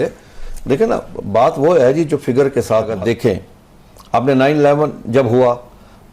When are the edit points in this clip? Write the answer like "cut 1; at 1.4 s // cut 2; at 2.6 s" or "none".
cut 1; at 3.0 s